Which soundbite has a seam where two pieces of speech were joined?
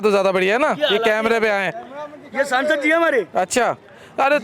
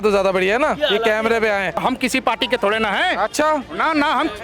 second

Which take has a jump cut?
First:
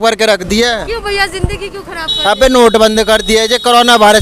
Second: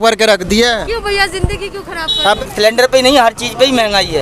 second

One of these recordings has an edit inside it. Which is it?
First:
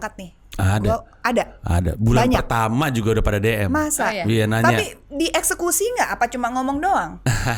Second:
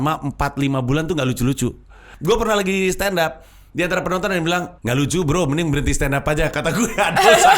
second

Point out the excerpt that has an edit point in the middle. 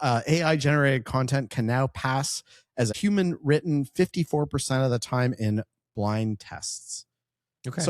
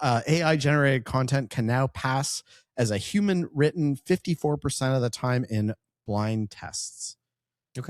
first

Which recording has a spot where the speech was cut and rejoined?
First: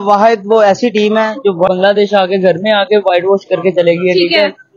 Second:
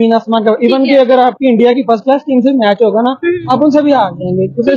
first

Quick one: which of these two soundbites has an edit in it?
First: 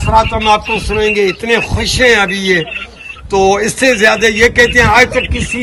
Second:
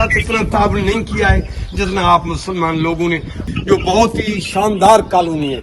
second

